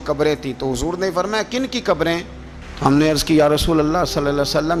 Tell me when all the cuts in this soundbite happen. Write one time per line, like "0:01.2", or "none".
none